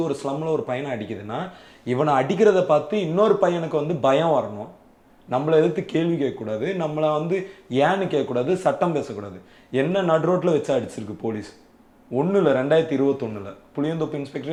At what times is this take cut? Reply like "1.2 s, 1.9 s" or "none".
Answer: none